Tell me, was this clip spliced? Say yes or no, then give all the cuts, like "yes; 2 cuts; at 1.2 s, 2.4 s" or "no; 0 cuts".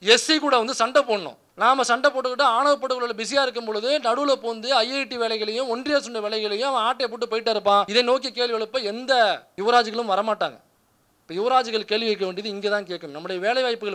yes; 3 cuts; at 1.4 s, 7.9 s, 9.5 s